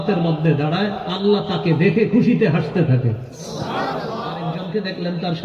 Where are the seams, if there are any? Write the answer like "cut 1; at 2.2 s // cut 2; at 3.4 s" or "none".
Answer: cut 1; at 4.5 s